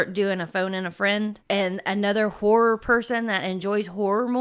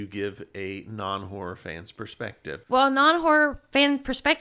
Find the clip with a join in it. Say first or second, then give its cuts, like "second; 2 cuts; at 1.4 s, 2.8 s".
second; 1 cut; at 2.6 s